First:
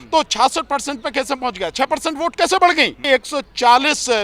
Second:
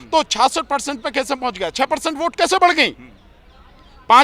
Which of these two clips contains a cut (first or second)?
first